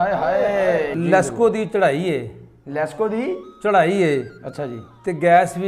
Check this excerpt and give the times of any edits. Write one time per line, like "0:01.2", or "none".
0:00.9